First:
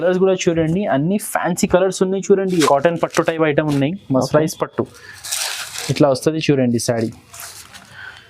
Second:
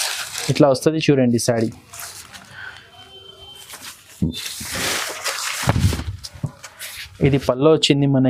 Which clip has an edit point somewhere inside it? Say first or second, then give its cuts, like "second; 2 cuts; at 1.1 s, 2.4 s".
first; 1 cut; at 2.7 s